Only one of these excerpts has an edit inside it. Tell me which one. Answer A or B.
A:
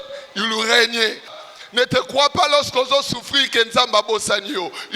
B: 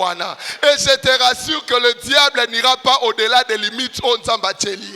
A